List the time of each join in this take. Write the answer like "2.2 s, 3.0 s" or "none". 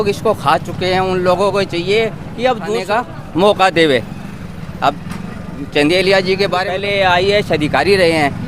2.8 s, 6.7 s